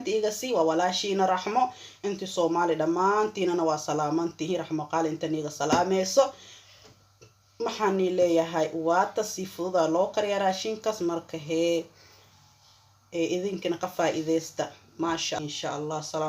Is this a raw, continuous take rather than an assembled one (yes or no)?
no